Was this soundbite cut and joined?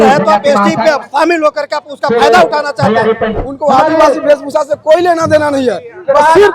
yes; 1 cut; at 3.3 s

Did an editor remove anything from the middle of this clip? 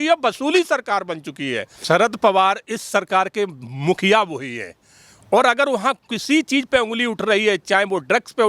yes; 1 cut; at 1.7 s

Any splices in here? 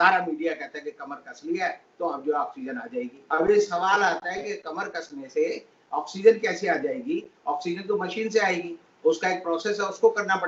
no; 0 cuts

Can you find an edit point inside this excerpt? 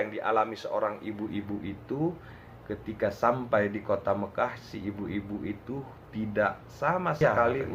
no; 0 cuts

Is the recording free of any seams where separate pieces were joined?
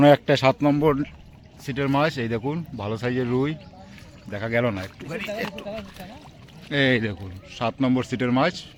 yes; 0 cuts

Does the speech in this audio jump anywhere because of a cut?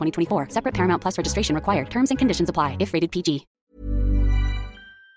no; 0 cuts

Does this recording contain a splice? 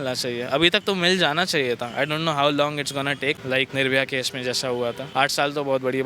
yes; 2 cuts; at 3.5 s, 5.0 s

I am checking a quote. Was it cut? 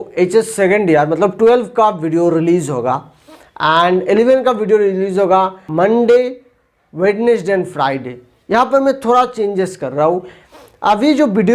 yes; 1 cut; at 5.6 s

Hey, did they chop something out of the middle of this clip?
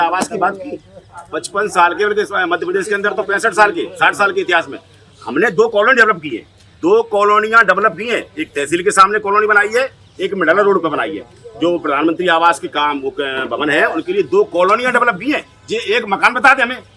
no; 0 cuts

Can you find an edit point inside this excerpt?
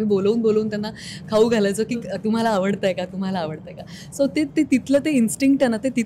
no; 0 cuts

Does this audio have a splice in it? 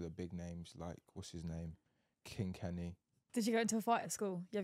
yes; 1 cut; at 3.2 s

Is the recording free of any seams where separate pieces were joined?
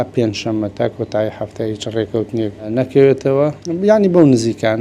no; 2 cuts; at 2.7 s, 3.6 s

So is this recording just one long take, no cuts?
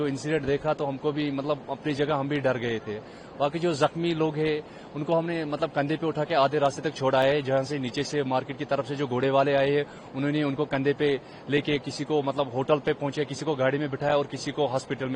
yes; 0 cuts

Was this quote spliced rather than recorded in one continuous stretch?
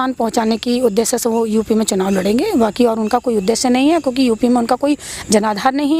no; 0 cuts

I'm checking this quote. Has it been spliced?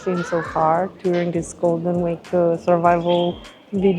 no; 0 cuts

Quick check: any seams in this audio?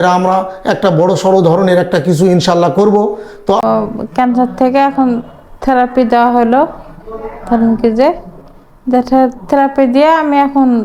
yes; 1 cut; at 3.6 s

